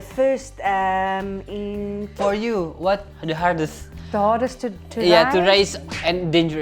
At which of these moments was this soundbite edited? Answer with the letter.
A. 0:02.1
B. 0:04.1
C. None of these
A